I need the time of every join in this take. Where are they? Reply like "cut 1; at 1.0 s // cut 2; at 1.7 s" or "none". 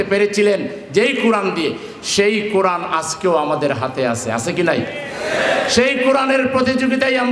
none

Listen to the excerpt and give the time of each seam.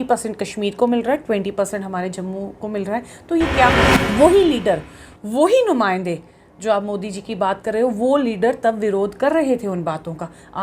cut 1; at 4.0 s

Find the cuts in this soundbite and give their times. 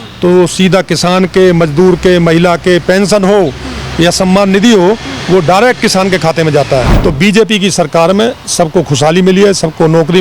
cut 1; at 6.9 s

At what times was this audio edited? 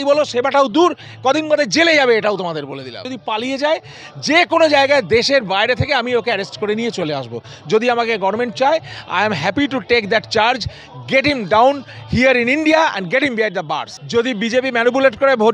cut 1; at 3.2 s // cut 2; at 13.9 s

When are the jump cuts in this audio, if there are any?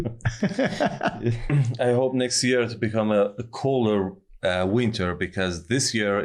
cut 1; at 1.5 s

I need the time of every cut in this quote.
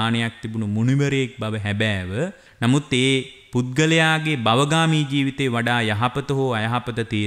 cut 1; at 2.4 s // cut 2; at 3.4 s

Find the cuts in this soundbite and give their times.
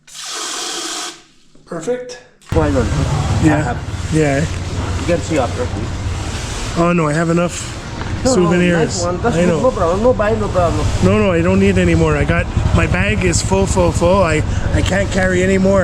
cut 1; at 2.5 s

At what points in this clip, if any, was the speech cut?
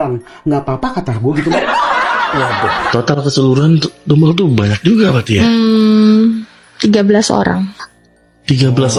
none

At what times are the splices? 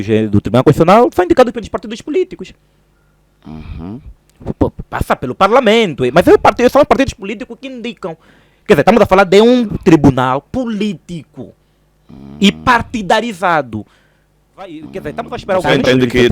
cut 1; at 14.9 s

